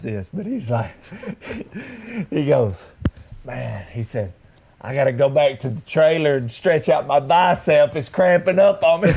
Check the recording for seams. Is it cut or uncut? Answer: uncut